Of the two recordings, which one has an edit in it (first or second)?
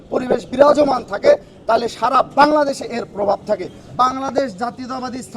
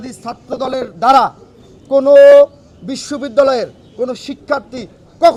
first